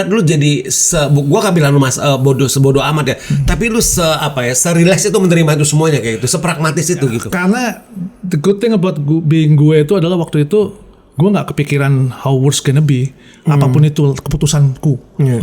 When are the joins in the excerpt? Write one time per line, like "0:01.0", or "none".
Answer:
0:07.2